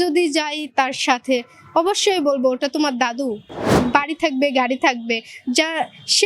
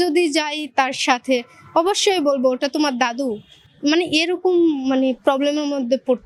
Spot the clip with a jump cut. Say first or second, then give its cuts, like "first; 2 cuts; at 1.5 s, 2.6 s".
first; 1 cut; at 3.7 s